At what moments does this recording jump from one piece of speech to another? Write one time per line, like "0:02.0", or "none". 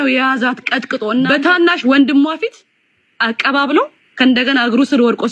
0:01.3